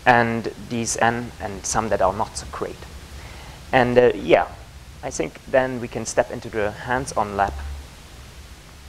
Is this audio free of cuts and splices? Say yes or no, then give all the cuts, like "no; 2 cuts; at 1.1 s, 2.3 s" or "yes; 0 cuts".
yes; 0 cuts